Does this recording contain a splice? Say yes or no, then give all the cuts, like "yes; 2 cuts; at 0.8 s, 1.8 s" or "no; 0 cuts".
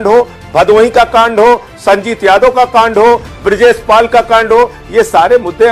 no; 0 cuts